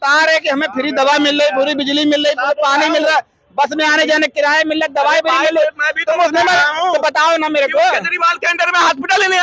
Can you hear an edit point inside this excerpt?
no; 0 cuts

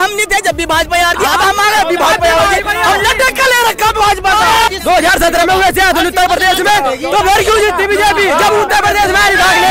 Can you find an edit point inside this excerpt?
yes; 1 cut; at 4.7 s

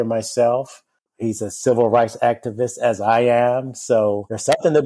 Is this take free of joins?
no; 1 cut; at 1.1 s

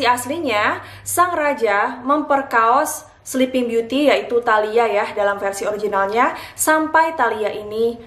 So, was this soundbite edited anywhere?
no; 0 cuts

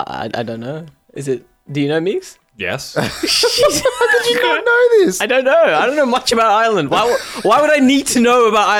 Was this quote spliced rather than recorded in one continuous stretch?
no; 0 cuts

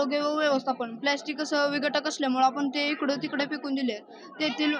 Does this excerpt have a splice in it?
no; 0 cuts

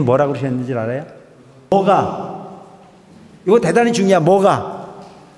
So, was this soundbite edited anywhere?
yes; 1 cut; at 1.7 s

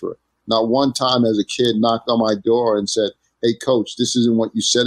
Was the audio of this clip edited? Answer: no; 0 cuts

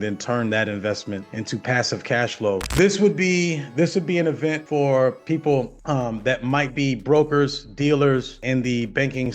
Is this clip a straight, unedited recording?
no; 1 cut; at 2.7 s

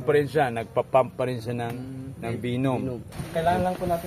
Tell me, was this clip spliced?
yes; 1 cut; at 3.1 s

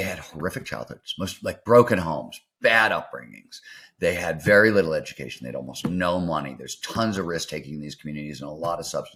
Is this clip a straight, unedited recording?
yes; 0 cuts

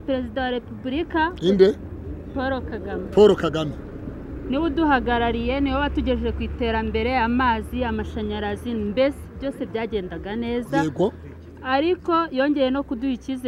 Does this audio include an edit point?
no; 0 cuts

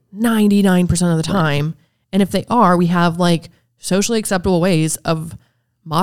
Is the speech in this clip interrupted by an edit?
no; 0 cuts

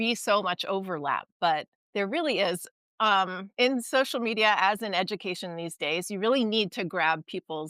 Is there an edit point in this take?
yes; 2 cuts; at 1.8 s, 3.4 s

